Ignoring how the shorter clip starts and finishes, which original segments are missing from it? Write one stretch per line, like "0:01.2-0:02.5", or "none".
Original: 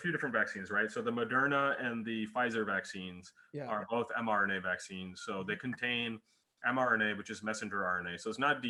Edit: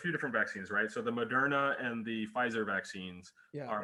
none